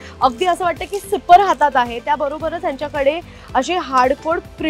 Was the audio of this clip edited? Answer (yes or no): no